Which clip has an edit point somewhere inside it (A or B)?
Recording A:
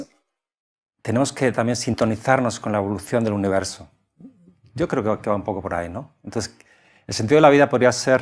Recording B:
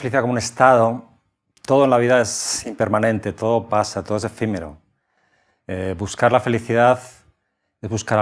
A